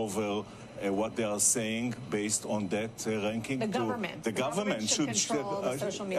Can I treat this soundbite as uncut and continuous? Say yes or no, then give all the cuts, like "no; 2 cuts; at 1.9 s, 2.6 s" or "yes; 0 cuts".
no; 1 cut; at 1.1 s